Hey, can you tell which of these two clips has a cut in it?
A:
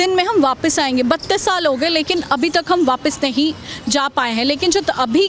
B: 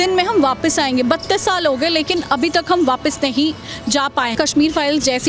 B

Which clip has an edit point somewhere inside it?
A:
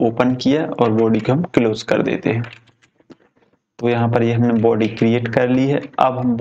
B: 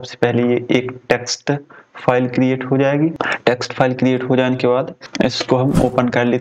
B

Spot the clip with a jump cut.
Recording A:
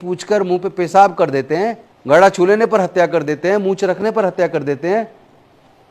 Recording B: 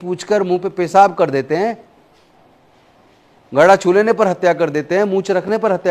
A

